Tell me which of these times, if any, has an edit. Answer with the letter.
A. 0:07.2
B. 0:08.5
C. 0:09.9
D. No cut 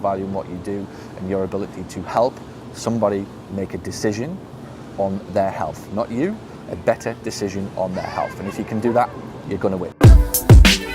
C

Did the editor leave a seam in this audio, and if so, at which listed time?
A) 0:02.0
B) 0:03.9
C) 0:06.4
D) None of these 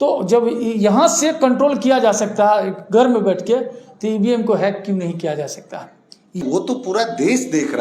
C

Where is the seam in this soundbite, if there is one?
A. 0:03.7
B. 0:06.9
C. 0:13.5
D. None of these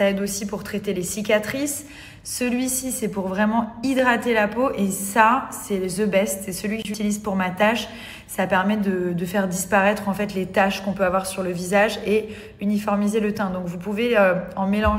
B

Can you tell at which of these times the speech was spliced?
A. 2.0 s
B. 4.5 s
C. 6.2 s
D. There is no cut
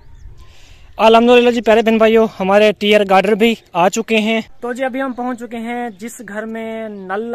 B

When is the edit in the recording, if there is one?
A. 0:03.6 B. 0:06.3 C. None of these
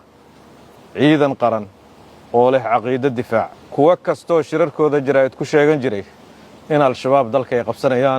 A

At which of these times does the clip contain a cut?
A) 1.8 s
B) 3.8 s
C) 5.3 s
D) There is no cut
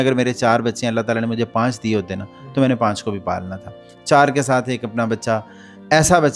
D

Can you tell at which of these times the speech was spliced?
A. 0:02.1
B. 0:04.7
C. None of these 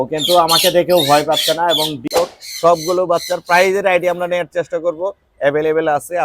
A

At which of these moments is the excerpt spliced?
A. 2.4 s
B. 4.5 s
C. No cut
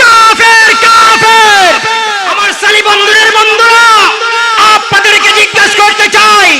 A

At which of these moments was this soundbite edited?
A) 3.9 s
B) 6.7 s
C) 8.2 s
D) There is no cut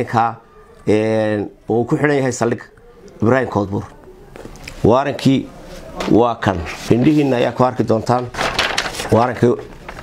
B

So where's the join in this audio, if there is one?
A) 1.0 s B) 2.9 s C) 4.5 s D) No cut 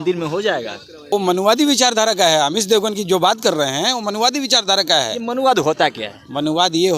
A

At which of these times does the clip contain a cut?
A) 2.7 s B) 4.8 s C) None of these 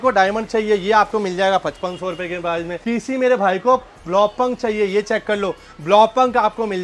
A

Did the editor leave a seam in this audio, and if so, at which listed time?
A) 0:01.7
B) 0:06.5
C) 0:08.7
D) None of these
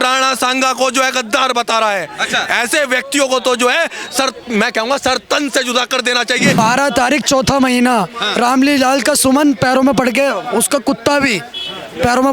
B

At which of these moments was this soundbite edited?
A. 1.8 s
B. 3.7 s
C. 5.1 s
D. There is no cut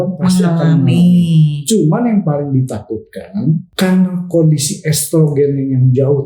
B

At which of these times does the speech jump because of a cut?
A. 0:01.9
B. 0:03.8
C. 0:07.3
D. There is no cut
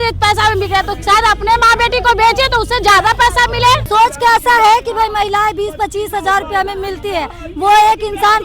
B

